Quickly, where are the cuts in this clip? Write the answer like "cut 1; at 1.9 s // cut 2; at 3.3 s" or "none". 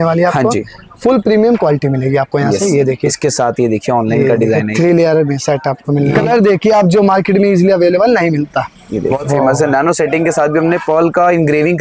cut 1; at 6.3 s // cut 2; at 9.2 s